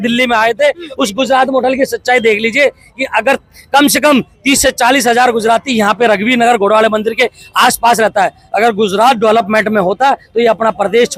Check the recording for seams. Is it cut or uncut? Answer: uncut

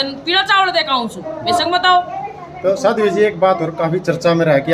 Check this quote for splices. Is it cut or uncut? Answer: uncut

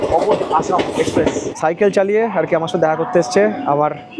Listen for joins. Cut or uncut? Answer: cut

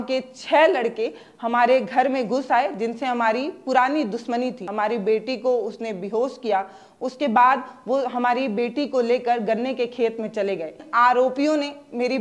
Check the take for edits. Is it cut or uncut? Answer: cut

